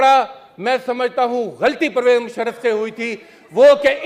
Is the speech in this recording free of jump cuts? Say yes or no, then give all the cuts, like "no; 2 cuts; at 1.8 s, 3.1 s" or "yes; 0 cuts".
yes; 0 cuts